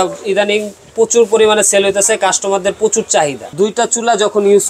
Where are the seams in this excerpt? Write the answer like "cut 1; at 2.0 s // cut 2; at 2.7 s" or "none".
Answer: cut 1; at 3.5 s